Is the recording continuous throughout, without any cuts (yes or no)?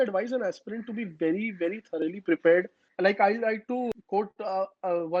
no